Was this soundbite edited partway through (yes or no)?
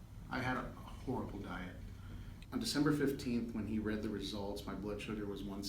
yes